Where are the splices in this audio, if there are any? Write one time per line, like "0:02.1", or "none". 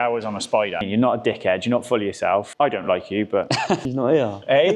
0:00.9
0:02.5
0:03.8